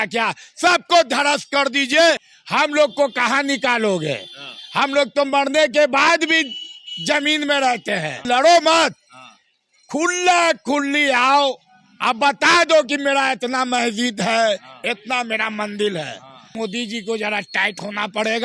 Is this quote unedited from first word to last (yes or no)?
no